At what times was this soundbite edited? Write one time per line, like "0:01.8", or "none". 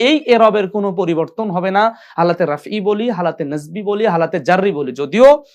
none

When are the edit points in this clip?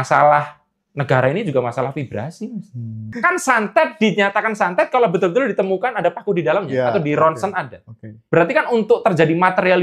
0:03.1
0:08.2

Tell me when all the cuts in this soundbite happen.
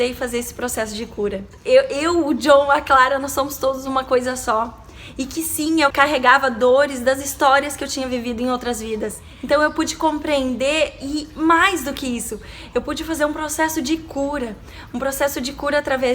0:01.5
0:05.9
0:09.3

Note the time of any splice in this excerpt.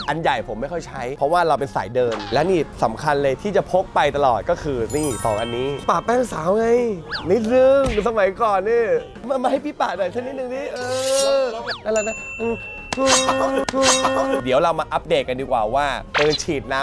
0:02.3
0:09.3
0:14.4

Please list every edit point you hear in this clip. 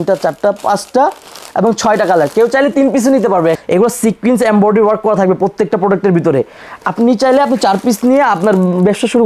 0:03.6

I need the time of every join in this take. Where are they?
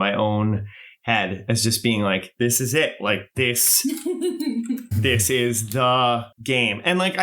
0:06.3

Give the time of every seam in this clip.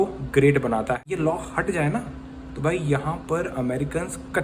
0:01.0

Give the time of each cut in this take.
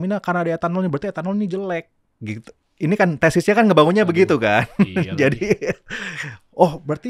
none

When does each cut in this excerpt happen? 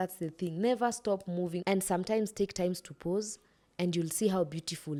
none

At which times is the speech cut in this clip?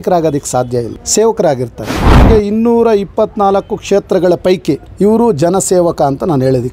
0:01.0
0:02.2
0:04.9

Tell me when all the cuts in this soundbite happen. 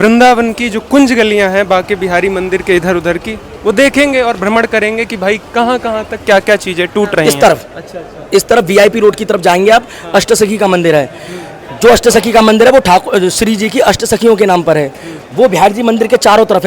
0:07.2

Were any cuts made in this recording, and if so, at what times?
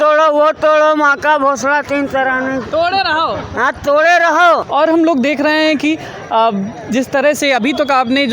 0:04.7

